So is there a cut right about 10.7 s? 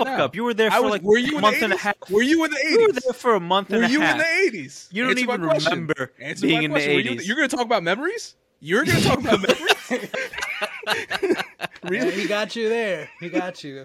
no; 0 cuts

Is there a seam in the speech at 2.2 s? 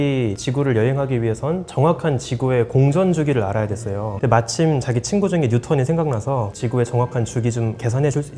no; 2 cuts; at 4.1 s, 6.5 s

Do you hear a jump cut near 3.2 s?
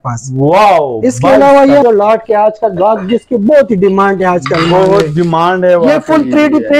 no; 1 cut; at 1.8 s

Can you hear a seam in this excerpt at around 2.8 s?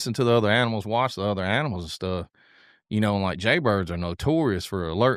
no; 0 cuts

